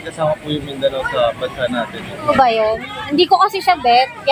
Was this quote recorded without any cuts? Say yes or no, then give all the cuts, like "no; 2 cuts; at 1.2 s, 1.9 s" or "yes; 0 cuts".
no; 1 cut; at 2.3 s